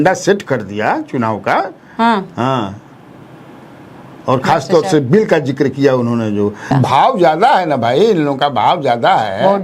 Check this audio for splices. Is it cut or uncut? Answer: cut